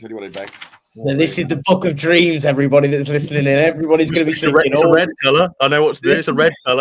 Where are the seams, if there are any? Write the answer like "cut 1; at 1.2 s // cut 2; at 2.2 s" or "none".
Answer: none